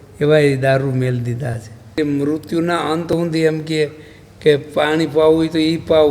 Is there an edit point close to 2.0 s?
yes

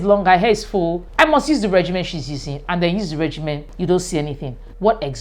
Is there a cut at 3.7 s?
yes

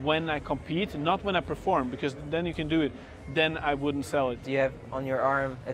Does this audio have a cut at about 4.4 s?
yes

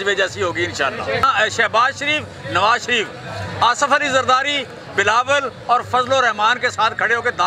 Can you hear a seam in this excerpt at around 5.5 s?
no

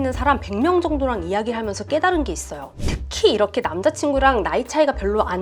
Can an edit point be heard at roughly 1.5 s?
no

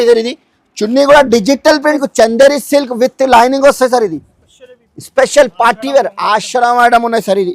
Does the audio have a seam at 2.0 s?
yes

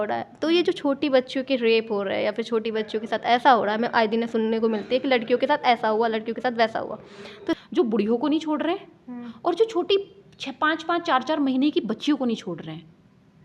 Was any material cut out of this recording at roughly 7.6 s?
yes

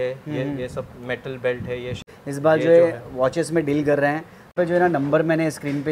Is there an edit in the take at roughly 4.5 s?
yes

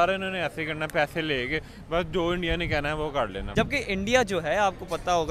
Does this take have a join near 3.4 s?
yes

